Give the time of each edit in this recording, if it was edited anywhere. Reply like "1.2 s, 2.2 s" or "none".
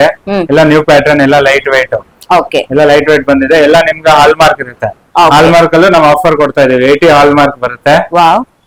none

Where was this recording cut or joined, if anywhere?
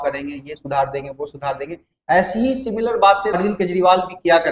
3.4 s

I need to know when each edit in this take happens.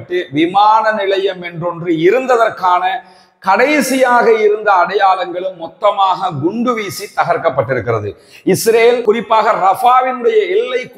none

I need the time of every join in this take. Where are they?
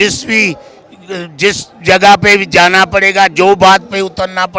none

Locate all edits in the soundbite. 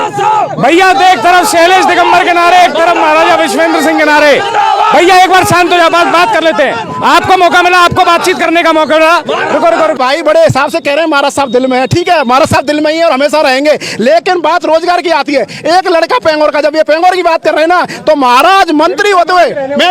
10.0 s

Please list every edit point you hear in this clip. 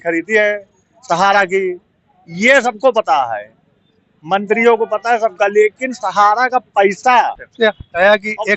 7.4 s

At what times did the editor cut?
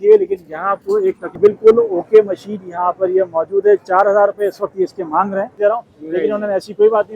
1.3 s, 5.5 s

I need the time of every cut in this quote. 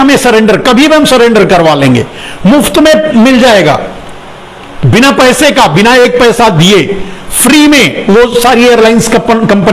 none

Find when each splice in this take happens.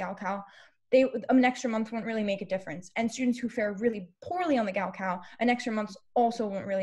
none

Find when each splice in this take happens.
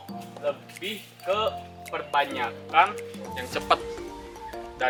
none

